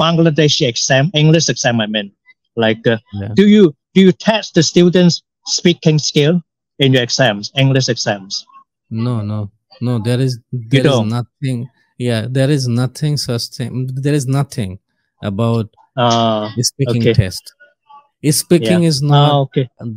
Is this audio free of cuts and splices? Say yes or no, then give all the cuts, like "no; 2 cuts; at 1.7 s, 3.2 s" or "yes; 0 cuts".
yes; 0 cuts